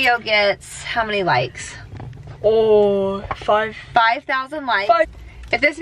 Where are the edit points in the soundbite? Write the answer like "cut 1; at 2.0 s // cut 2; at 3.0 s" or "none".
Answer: none

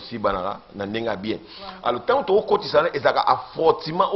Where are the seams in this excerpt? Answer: none

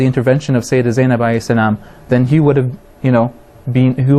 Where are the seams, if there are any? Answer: cut 1; at 2.3 s

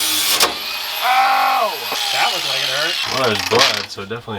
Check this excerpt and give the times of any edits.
cut 1; at 2.0 s // cut 2; at 3.0 s

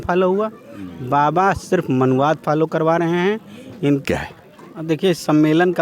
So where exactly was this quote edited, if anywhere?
cut 1; at 4.0 s

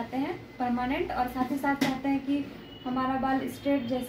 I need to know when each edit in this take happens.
none

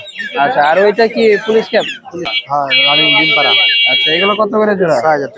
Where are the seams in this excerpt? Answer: cut 1; at 2.4 s

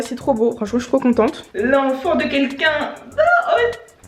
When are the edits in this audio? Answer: cut 1; at 1.5 s

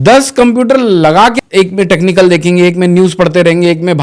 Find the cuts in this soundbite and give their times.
cut 1; at 1.3 s

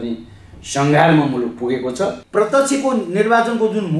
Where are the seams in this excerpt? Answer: cut 1; at 2.2 s

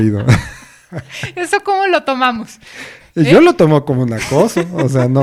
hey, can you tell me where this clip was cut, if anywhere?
none

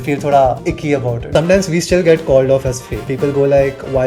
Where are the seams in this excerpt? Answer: cut 1; at 1.2 s // cut 2; at 2.9 s

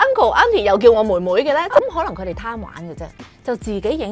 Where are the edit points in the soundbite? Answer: cut 1; at 1.8 s

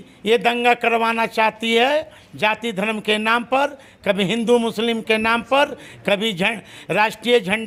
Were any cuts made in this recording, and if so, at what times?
none

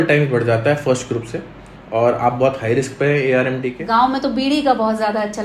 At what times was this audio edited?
cut 1; at 3.8 s

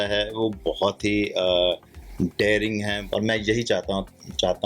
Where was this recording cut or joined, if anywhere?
cut 1; at 3.0 s

